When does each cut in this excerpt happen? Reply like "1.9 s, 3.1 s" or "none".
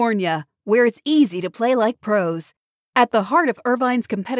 none